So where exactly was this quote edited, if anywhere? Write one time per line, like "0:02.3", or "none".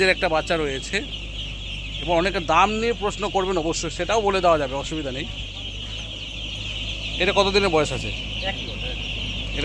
none